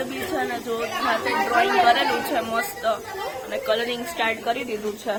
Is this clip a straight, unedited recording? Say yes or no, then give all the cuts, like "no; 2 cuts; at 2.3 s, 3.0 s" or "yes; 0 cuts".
yes; 0 cuts